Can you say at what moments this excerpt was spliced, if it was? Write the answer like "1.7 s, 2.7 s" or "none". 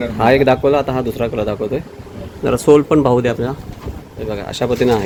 none